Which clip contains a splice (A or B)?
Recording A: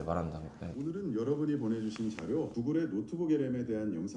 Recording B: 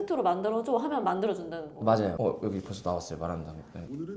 B